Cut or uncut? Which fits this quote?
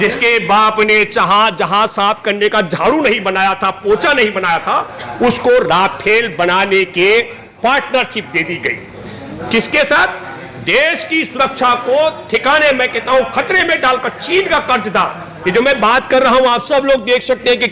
uncut